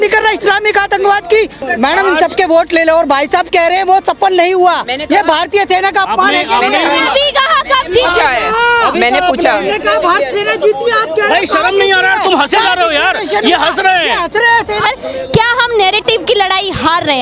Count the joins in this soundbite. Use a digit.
2